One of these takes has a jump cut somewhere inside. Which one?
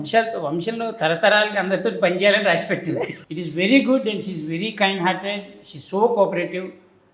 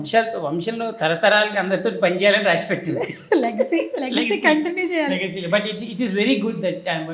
first; 1 cut; at 3.1 s

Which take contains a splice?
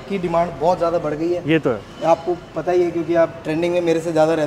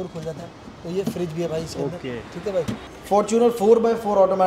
second; 1 cut; at 2.8 s

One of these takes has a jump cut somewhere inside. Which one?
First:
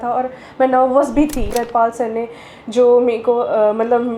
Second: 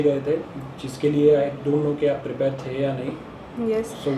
first; 1 cut; at 1.5 s

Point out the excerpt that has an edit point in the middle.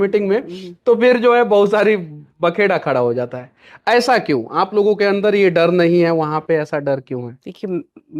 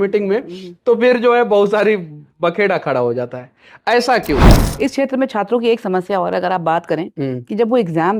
second; 1 cut; at 4.5 s

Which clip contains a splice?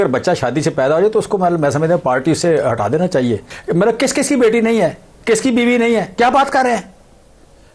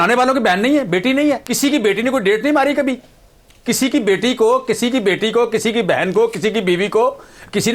first; 2 cuts; at 3.5 s, 6.1 s

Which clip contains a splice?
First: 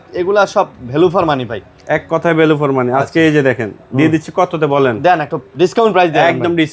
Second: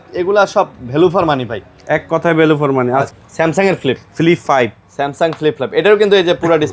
second; 1 cut; at 3.1 s

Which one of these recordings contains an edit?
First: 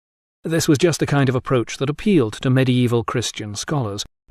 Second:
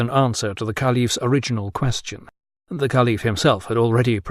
second; 1 cut; at 3.1 s

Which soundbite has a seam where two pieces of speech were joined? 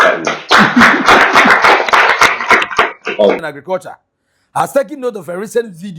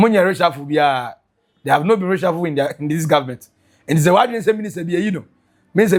first; 1 cut; at 3.4 s

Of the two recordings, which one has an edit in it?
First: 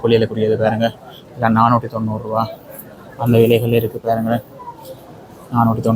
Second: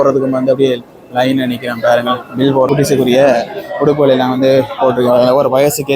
second; 1 cut; at 2.7 s

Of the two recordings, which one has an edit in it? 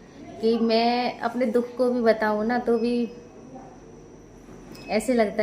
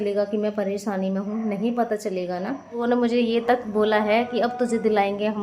second; 1 cut; at 2.8 s

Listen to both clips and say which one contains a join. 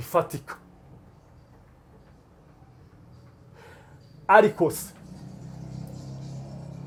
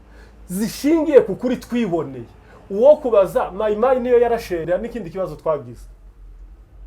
second; 1 cut; at 4.6 s

